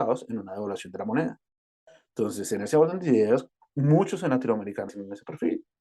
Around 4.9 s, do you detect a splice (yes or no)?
yes